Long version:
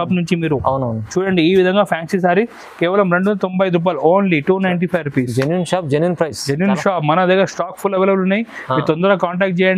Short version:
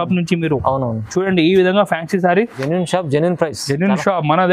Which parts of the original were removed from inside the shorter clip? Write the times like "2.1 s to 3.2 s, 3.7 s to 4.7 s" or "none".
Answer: 2.6 s to 5.4 s